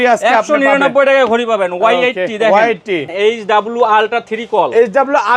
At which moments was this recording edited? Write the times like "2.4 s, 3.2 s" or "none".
3.0 s